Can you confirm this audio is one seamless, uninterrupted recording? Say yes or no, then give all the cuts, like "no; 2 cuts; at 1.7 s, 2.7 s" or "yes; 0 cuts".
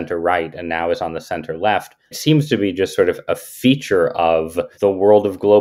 no; 2 cuts; at 2.1 s, 4.7 s